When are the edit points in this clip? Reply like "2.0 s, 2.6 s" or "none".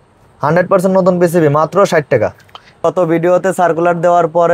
2.8 s